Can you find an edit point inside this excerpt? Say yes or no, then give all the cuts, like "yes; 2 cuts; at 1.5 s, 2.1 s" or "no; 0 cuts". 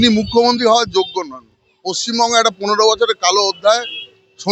no; 0 cuts